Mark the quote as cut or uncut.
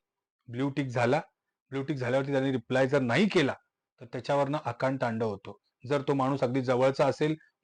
uncut